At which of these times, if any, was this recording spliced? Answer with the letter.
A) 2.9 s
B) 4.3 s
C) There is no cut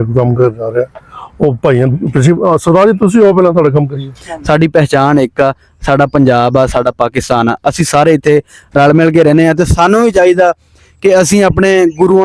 B